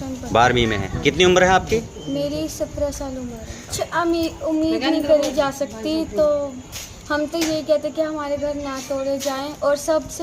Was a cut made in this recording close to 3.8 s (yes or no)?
yes